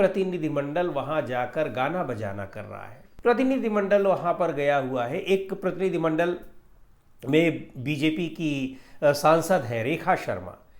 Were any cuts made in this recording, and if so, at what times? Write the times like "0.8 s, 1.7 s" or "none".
3.0 s

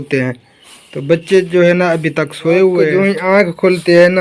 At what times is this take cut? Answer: 2.9 s

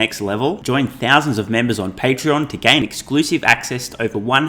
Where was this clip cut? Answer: none

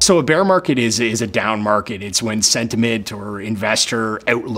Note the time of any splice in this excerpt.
2.0 s

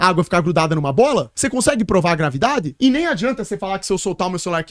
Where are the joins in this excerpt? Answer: none

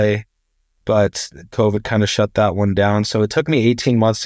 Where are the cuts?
none

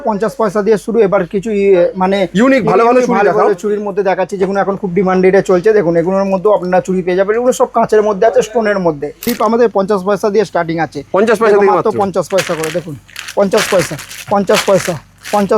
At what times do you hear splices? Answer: 9.3 s

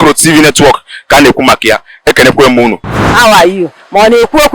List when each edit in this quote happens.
2.9 s

